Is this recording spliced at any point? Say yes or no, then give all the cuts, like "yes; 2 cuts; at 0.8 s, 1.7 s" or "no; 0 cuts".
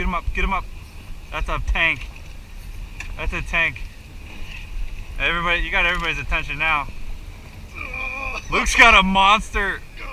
no; 0 cuts